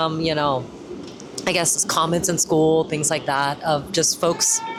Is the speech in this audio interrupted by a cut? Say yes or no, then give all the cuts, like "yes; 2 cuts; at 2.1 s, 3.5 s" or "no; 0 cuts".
no; 0 cuts